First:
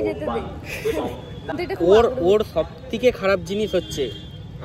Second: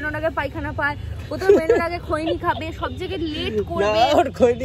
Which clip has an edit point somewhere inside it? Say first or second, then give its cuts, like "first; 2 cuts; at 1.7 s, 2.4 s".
first; 1 cut; at 1.5 s